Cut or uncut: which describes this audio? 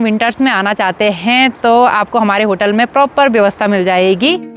uncut